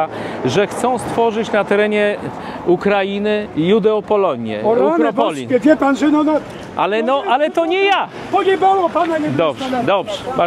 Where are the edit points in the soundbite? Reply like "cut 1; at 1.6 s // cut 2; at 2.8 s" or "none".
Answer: none